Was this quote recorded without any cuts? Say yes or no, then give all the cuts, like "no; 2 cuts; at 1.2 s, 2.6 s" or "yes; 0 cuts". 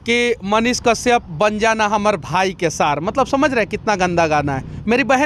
yes; 0 cuts